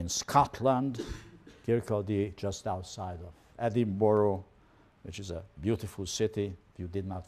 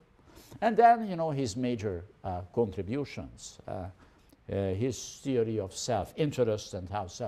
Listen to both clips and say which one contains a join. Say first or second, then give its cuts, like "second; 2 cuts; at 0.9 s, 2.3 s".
first; 1 cut; at 1.4 s